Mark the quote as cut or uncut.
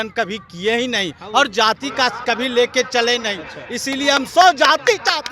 uncut